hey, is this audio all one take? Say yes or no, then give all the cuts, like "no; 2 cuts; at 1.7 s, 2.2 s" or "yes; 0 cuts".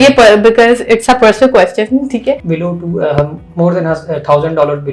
no; 1 cut; at 2.4 s